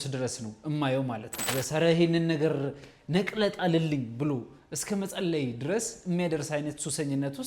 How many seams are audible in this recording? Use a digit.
1